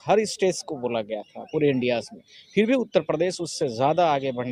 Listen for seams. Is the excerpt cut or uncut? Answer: uncut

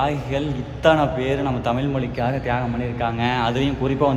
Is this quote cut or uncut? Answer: uncut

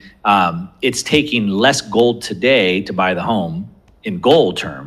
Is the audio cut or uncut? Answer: uncut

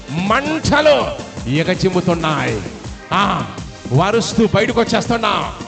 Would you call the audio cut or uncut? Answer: uncut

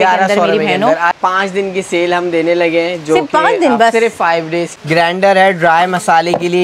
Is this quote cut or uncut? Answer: cut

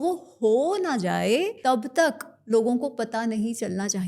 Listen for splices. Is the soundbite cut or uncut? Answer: cut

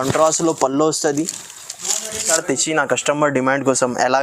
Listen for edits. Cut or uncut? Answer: cut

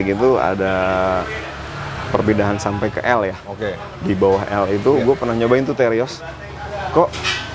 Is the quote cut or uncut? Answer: uncut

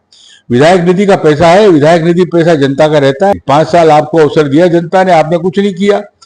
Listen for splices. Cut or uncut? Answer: cut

